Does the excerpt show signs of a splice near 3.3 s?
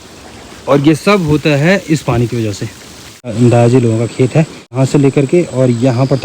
yes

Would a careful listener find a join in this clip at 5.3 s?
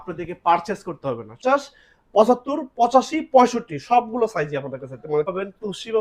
yes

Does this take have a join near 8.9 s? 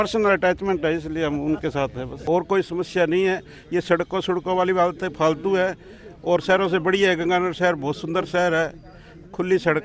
no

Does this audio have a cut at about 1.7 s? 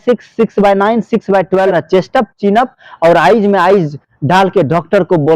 yes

